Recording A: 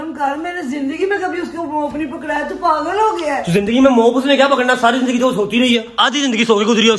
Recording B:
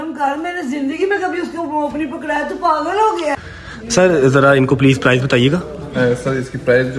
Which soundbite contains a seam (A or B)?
B